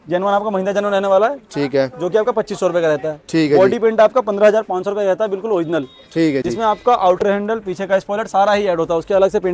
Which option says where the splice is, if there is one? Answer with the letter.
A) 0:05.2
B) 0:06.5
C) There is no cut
C